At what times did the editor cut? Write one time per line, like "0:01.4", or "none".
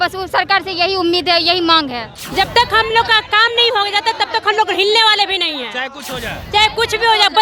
0:02.1

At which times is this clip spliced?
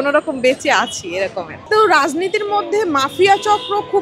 0:01.6

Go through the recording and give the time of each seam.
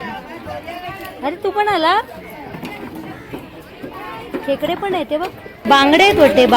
0:05.6

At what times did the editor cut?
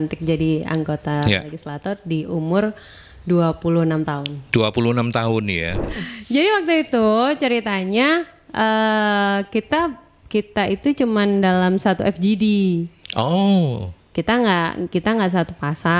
0:05.9

